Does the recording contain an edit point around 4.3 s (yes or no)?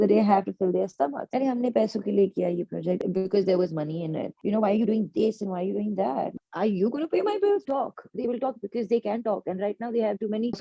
yes